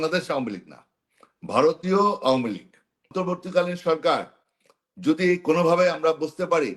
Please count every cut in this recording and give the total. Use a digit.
1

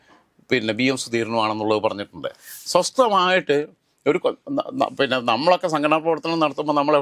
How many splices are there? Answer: 1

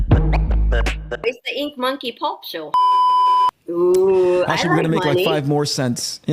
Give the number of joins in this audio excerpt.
1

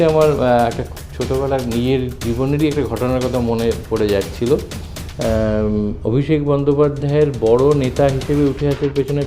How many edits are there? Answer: 1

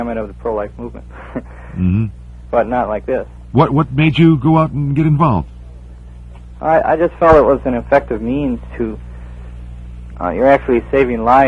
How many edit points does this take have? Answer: 1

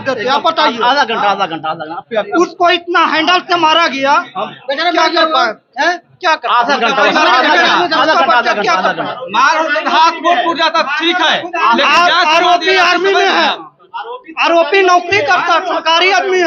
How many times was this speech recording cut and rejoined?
0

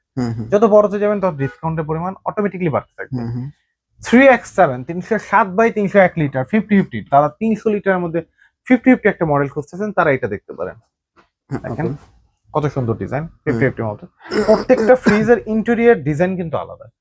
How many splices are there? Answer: 0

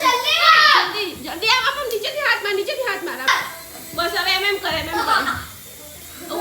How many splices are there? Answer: 1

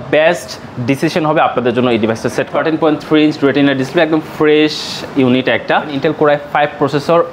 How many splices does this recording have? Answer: 2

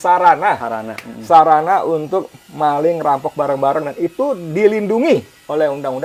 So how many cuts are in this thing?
0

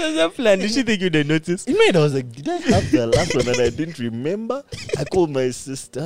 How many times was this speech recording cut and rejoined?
0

